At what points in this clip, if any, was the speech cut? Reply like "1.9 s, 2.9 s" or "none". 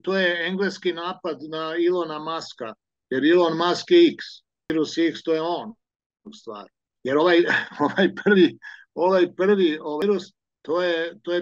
4.7 s, 10.0 s